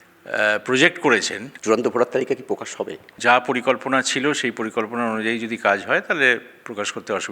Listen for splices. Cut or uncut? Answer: cut